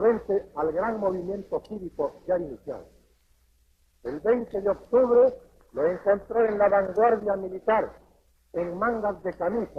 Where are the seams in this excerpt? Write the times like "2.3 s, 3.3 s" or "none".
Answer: 6.3 s

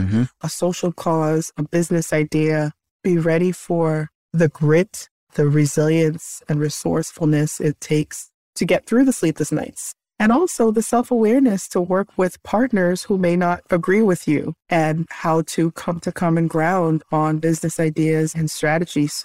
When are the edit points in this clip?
none

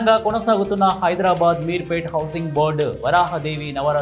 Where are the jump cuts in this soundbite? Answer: none

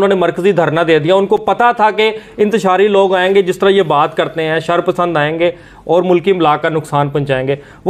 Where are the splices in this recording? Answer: none

